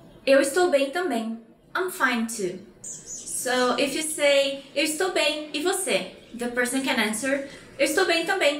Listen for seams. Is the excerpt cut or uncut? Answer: uncut